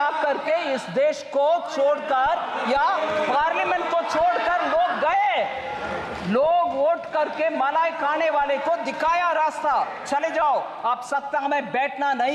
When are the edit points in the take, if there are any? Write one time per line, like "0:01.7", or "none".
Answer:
none